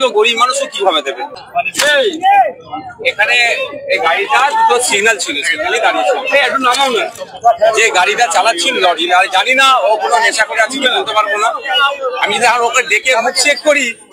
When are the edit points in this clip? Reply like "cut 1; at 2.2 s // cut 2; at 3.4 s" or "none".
cut 1; at 1.2 s

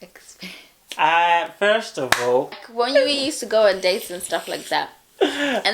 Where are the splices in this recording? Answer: cut 1; at 2.6 s

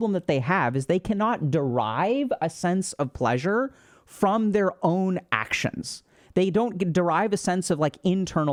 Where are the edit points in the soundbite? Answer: none

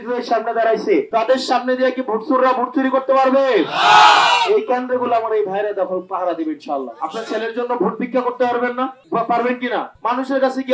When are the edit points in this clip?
cut 1; at 7.0 s

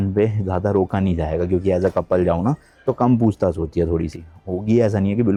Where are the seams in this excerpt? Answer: none

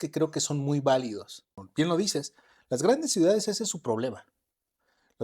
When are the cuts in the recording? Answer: cut 1; at 1.6 s

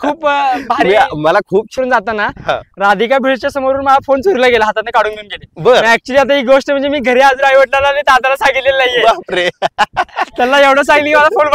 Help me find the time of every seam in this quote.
cut 1; at 1.7 s

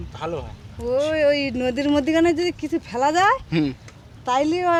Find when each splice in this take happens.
none

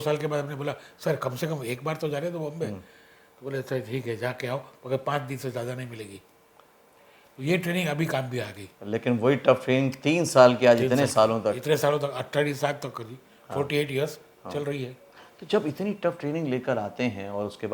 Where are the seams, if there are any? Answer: none

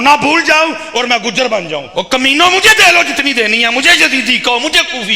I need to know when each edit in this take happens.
cut 1; at 1.9 s

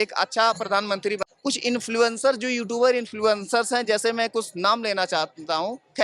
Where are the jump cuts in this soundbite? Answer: cut 1; at 1.3 s

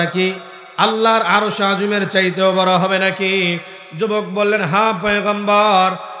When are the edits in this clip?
none

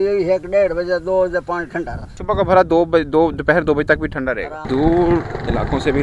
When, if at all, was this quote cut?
cut 1; at 2.1 s // cut 2; at 4.6 s

